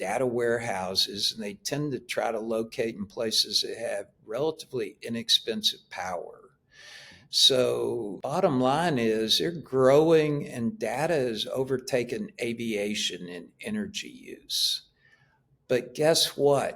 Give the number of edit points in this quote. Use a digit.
1